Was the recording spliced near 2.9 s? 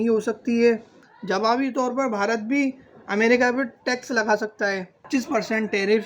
no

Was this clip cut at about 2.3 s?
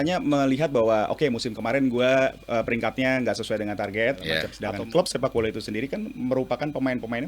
no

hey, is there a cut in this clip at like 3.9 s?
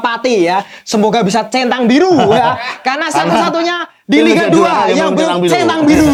no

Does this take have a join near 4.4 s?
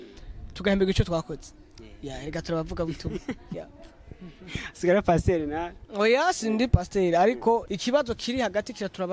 no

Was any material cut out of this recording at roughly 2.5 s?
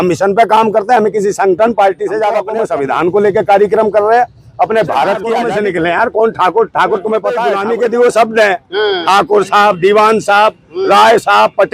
yes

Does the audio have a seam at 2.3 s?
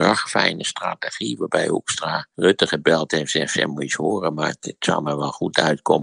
yes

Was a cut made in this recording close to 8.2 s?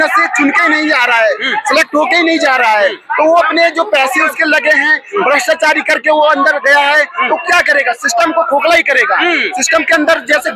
no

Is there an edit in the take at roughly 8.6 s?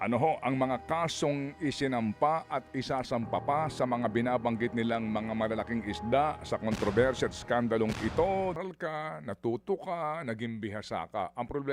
yes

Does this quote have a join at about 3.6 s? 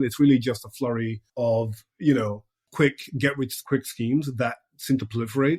yes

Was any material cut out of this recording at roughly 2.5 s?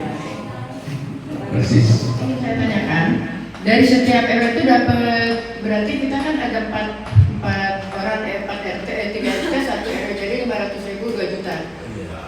yes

